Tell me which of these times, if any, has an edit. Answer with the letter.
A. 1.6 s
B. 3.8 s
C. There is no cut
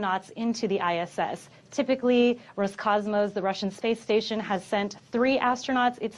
C